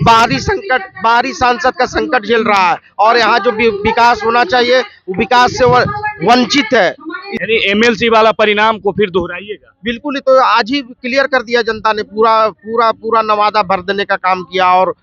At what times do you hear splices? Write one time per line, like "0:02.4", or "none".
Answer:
0:07.3